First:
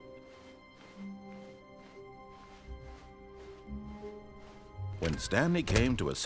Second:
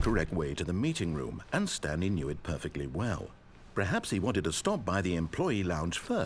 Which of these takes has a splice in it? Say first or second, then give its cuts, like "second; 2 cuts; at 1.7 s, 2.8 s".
first; 1 cut; at 5.0 s